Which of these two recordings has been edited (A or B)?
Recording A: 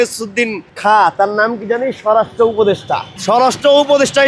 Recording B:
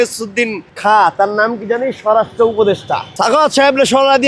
B